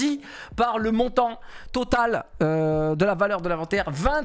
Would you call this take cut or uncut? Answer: uncut